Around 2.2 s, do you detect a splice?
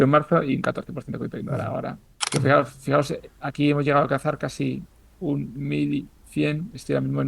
yes; 1 cut; at 2.2 s

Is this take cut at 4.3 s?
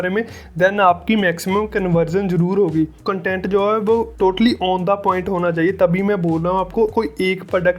no; 1 cut; at 3.0 s

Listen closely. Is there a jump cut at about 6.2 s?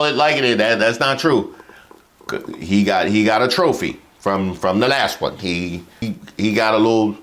yes; 1 cut; at 6.2 s

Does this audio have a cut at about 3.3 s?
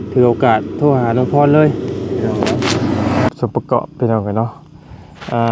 yes; 1 cut; at 3.3 s

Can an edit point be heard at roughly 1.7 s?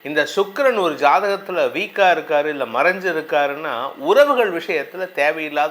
no; 0 cuts

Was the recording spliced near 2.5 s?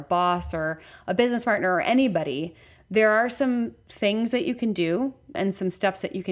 no; 1 cut; at 5.4 s

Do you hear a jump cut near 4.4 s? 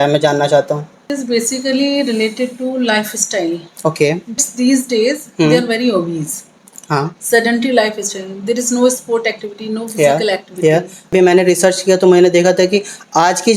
yes; 3 cuts; at 1.0 s, 4.4 s, 11.1 s

